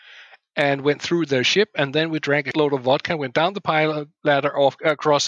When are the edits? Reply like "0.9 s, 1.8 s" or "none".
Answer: 2.5 s